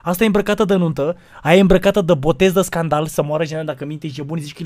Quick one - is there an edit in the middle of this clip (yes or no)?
no